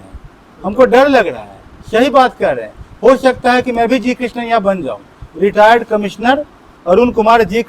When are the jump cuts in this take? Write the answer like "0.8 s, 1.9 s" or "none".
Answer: none